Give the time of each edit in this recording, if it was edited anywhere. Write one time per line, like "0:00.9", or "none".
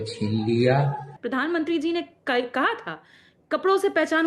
0:01.1